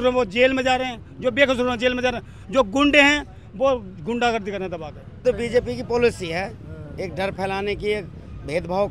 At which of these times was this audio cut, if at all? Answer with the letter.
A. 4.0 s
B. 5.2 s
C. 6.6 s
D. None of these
B